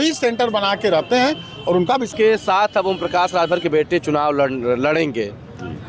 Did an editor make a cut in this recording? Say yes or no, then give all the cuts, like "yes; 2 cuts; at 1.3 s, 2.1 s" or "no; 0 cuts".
yes; 1 cut; at 2.1 s